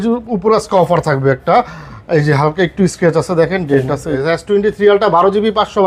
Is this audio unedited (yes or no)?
no